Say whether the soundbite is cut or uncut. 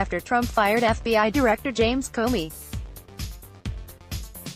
cut